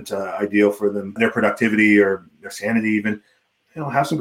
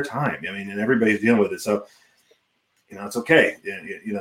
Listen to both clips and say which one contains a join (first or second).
first